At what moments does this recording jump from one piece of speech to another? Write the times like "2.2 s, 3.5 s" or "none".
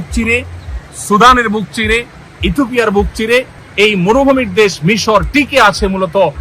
3.6 s